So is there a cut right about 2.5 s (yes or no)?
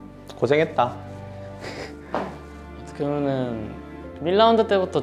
yes